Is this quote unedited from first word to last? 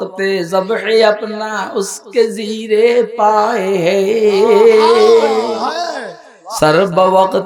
yes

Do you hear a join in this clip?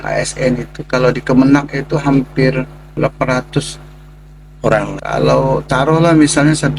yes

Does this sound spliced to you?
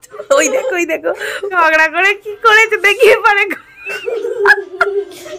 yes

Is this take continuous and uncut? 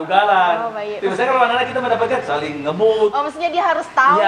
yes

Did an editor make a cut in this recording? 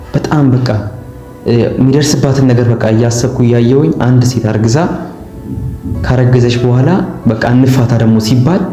no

